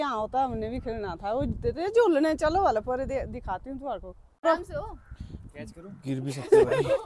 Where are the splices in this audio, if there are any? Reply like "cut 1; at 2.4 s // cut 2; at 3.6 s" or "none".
none